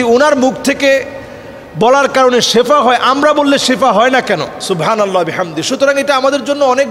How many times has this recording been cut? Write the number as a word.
one